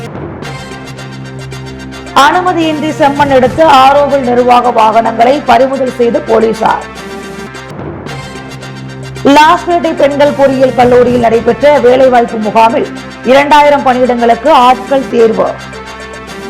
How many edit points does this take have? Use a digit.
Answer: 0